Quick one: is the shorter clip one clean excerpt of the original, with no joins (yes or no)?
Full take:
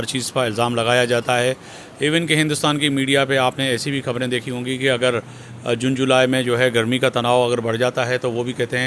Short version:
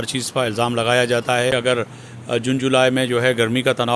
no